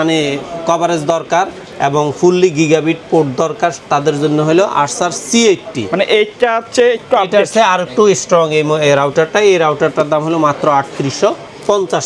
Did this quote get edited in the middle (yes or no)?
no